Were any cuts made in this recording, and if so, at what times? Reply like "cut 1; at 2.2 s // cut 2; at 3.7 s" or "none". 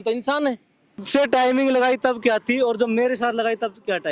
cut 1; at 1.1 s